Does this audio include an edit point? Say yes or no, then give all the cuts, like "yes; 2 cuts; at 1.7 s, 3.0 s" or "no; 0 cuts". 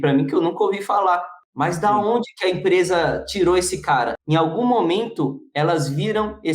yes; 2 cuts; at 1.4 s, 4.2 s